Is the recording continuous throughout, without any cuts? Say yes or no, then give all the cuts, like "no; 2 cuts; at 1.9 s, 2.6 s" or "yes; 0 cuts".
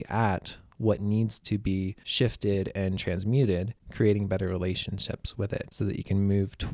no; 3 cuts; at 2.0 s, 3.8 s, 5.7 s